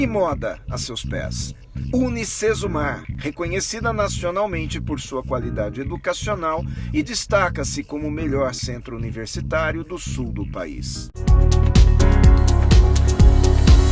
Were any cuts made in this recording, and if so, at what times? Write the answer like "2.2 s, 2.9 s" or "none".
11.5 s